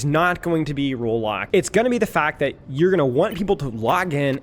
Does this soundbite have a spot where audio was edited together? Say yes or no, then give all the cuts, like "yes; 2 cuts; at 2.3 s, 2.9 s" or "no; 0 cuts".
yes; 1 cut; at 1.4 s